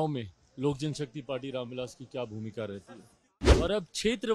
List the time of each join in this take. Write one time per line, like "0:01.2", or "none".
0:03.4